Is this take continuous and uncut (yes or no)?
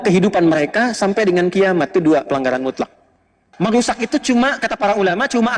no